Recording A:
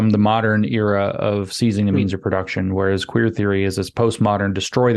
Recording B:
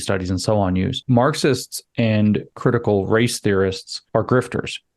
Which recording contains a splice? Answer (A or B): B